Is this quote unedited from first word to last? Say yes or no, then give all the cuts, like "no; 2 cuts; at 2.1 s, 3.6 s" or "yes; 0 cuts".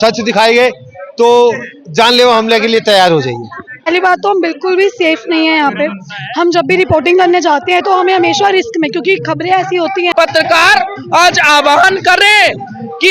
no; 2 cuts; at 3.9 s, 10.1 s